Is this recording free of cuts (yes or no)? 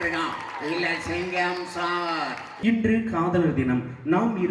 no